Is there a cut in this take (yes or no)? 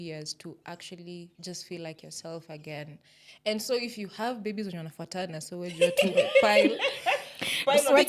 no